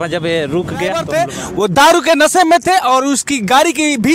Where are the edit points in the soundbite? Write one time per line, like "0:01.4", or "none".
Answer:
0:01.1